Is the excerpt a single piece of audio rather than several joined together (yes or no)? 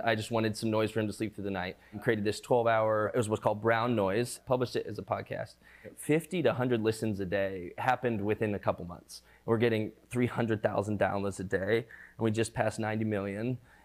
no